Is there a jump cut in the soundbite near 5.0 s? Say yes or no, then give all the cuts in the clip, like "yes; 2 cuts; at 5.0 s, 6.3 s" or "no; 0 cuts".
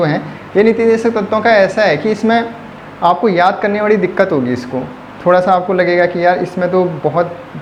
no; 0 cuts